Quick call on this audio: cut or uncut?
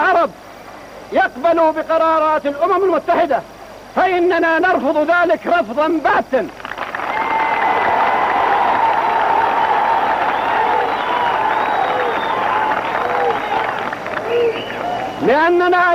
uncut